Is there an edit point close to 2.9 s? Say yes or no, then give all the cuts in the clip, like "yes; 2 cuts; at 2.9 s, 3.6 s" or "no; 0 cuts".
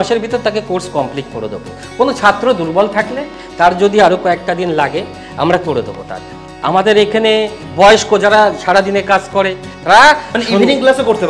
no; 2 cuts; at 6.5 s, 9.7 s